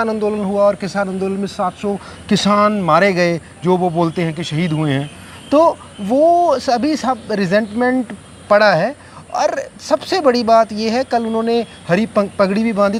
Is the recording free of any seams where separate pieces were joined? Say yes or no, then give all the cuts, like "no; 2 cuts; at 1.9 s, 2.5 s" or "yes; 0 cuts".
yes; 0 cuts